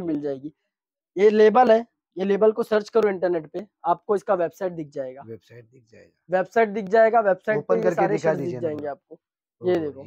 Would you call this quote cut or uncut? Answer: uncut